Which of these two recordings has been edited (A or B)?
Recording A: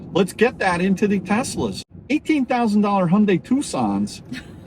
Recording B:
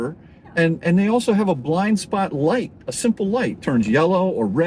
A